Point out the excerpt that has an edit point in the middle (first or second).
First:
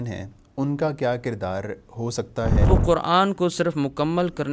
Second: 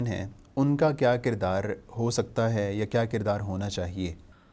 first